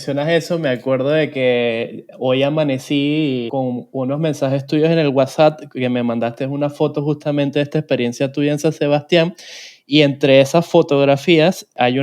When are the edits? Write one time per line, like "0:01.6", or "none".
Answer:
0:03.5